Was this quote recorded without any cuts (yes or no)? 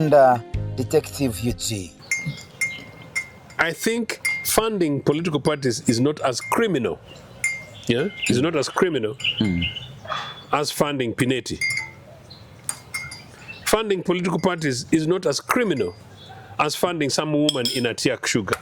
no